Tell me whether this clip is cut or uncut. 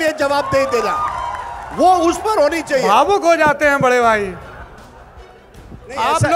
cut